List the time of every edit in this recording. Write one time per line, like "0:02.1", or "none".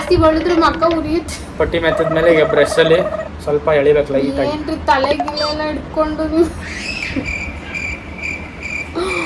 none